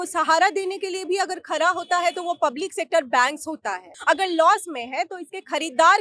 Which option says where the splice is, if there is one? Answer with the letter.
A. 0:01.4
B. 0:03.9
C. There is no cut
B